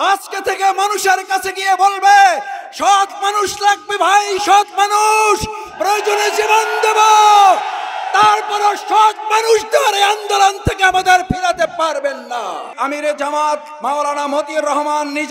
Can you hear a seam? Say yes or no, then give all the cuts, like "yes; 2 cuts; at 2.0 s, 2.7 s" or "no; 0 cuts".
yes; 1 cut; at 12.7 s